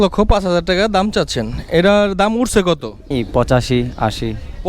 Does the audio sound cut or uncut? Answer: cut